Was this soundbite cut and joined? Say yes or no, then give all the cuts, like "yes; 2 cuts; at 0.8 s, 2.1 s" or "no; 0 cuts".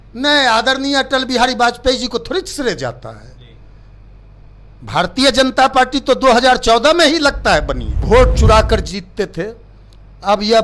yes; 1 cut; at 8.0 s